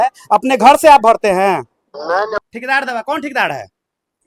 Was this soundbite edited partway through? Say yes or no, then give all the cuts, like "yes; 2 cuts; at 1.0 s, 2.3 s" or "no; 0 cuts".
yes; 1 cut; at 2.4 s